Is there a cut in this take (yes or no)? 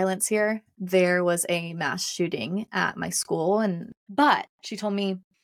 yes